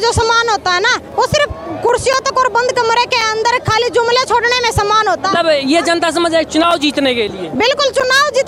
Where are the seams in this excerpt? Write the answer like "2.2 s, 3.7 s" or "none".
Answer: none